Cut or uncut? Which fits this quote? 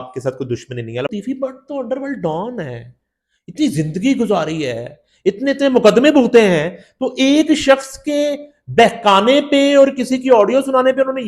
cut